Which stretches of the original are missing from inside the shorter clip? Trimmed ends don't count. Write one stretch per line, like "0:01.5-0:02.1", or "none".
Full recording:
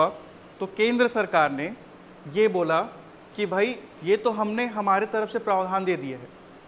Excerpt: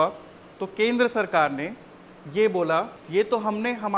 0:03.0-0:03.9